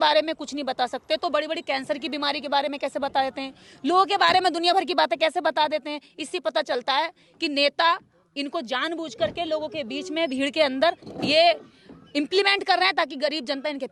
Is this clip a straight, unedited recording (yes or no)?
yes